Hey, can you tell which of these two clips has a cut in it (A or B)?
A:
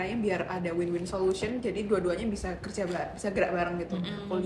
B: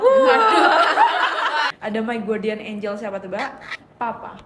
B